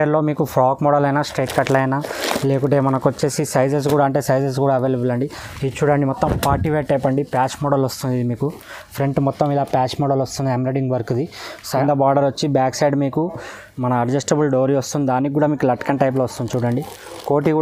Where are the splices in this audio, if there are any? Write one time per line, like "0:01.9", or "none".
0:11.8